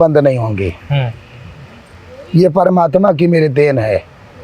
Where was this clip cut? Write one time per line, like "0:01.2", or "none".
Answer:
none